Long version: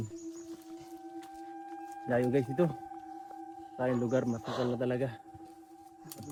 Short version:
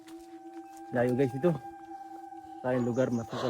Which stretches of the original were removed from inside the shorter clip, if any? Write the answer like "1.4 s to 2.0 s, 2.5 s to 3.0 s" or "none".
1.5 s to 2.1 s